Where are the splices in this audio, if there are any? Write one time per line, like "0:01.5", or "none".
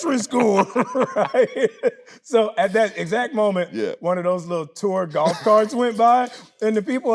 0:02.1